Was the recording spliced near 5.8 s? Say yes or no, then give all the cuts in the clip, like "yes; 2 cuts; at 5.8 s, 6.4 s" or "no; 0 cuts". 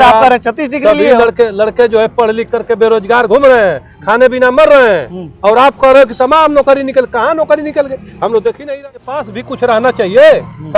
no; 1 cut; at 8.6 s